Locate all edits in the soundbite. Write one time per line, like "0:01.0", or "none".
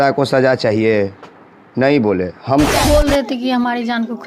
0:02.8